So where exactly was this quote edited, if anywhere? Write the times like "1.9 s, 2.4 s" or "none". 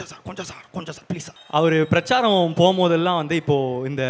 1.4 s

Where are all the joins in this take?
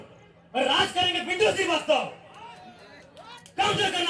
none

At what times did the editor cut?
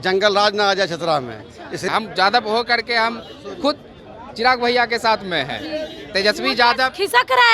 1.9 s

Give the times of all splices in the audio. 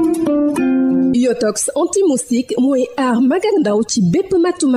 1.0 s

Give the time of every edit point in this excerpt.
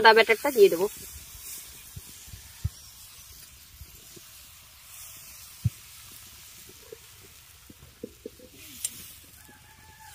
none

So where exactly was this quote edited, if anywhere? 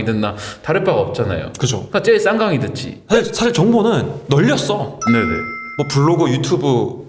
none

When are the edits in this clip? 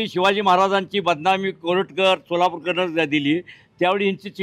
none

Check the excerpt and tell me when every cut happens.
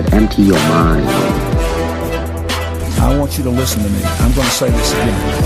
none

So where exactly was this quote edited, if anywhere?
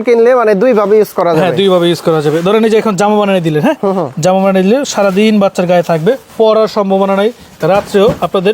none

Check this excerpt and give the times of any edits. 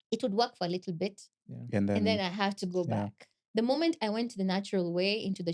3.3 s

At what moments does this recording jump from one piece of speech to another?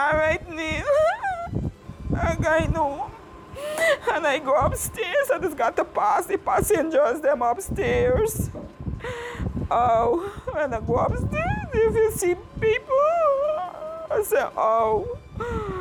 none

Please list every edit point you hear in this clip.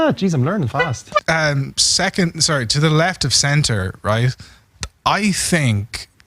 1.2 s

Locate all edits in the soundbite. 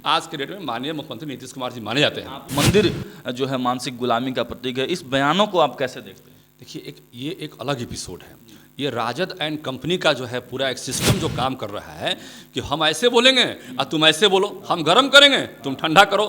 2.4 s

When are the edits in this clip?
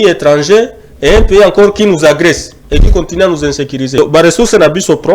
3.9 s

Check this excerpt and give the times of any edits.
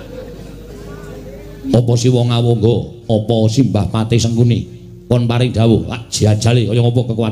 none

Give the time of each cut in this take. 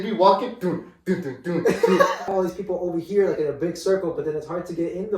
2.2 s

